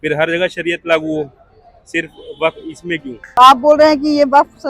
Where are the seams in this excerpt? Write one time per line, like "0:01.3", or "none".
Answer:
0:03.2

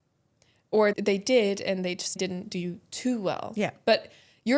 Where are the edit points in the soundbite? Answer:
0:00.9
0:02.2

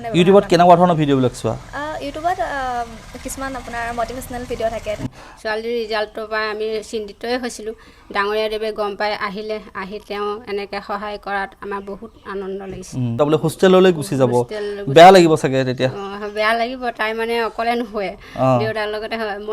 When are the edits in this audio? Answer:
0:05.1
0:13.2

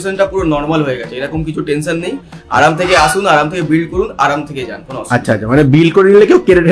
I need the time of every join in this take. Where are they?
none

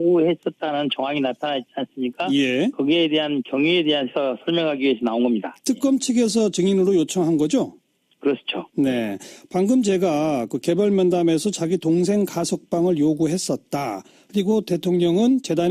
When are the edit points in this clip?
0:14.4

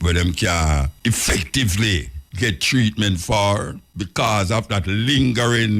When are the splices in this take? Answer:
0:00.9
0:02.2
0:03.8

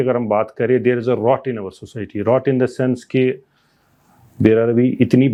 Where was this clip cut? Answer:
none

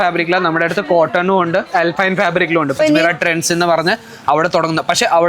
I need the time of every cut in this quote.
0:02.8

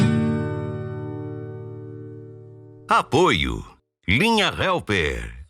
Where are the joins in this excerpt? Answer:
0:02.7

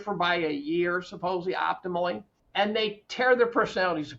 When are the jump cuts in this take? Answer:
0:02.3

